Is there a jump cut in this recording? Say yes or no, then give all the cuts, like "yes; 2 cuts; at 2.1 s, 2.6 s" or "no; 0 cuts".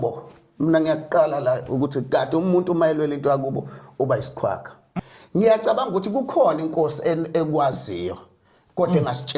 yes; 1 cut; at 4.9 s